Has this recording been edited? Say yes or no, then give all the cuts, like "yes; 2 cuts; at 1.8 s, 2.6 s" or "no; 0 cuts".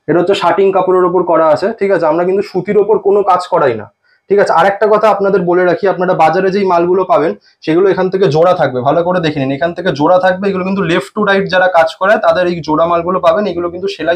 no; 0 cuts